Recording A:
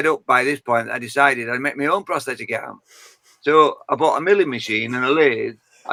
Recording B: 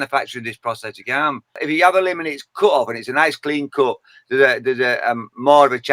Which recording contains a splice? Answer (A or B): B